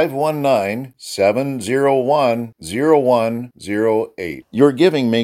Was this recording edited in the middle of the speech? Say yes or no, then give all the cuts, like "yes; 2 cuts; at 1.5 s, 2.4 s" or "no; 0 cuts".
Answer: no; 0 cuts